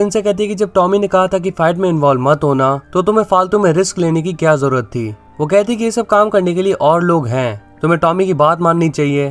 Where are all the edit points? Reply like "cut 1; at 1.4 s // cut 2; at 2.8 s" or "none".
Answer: cut 1; at 2.8 s